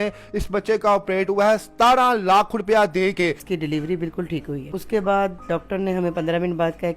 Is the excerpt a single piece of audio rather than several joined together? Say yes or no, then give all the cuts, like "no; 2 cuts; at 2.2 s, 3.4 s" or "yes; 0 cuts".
no; 2 cuts; at 3.5 s, 4.6 s